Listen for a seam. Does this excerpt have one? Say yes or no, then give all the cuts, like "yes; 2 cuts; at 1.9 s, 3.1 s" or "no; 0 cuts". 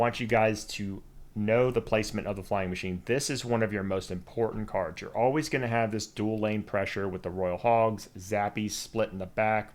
no; 0 cuts